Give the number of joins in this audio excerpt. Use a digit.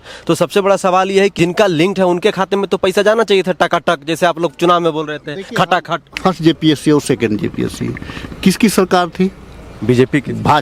2